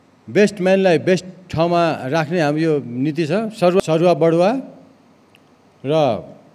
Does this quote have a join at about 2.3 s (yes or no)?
no